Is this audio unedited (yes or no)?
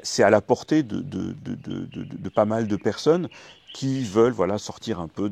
yes